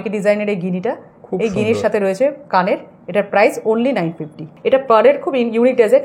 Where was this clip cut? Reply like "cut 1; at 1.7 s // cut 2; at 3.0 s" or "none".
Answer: cut 1; at 4.5 s